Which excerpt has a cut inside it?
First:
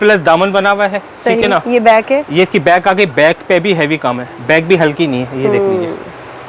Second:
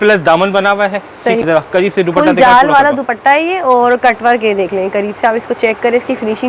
second; 1 cut; at 1.4 s

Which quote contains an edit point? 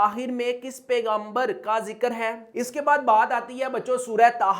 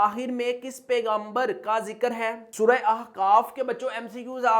first; 1 cut; at 2.5 s

